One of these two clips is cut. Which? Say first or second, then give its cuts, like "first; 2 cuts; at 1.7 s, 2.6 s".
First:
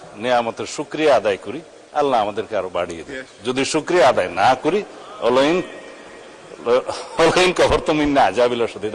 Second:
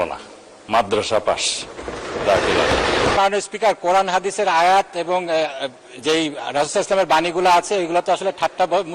second; 1 cut; at 3.2 s